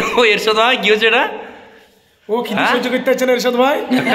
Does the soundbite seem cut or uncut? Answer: uncut